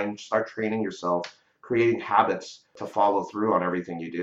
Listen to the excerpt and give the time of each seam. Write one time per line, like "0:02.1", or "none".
0:02.8